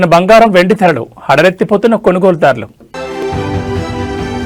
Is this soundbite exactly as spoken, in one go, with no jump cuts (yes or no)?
no